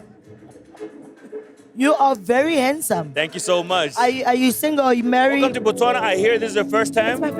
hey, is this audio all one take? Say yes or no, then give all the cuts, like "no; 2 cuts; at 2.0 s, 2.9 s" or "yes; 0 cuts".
no; 1 cut; at 5.5 s